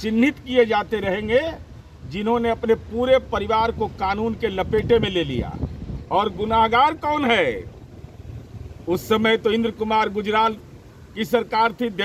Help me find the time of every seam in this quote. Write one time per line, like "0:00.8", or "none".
none